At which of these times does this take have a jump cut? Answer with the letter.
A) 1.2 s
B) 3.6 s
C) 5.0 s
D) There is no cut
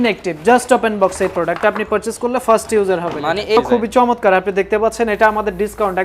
B